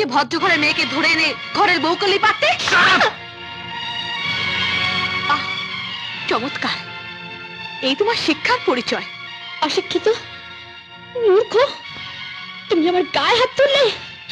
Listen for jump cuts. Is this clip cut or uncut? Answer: uncut